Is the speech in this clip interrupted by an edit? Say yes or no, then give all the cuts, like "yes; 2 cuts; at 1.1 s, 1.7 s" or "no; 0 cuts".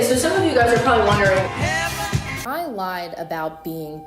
yes; 1 cut; at 2.3 s